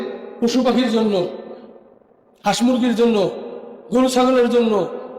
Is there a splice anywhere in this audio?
no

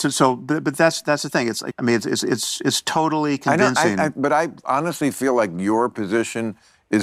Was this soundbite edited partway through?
yes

